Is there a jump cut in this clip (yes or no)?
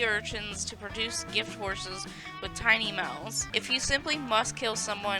yes